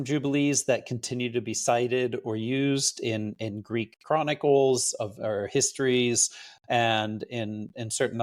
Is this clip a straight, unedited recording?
yes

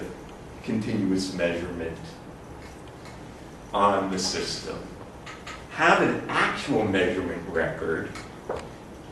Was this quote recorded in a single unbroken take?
no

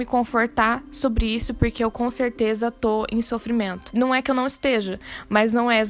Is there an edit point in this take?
no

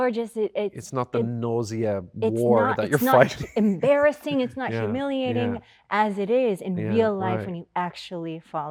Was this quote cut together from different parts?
no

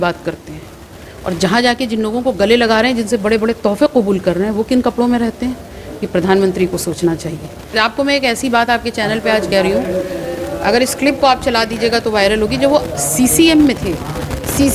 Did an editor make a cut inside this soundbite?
yes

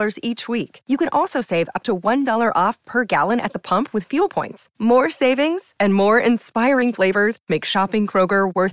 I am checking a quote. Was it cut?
no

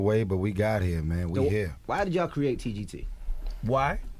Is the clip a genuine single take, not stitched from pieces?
yes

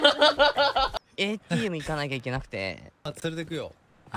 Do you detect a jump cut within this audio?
yes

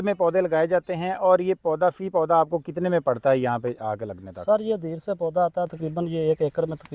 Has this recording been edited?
no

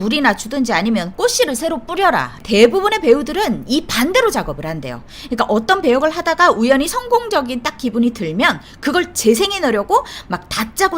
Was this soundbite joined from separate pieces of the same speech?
yes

